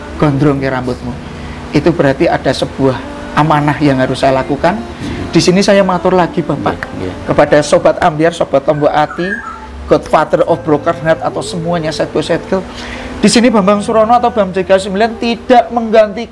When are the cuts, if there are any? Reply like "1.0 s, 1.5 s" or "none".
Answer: none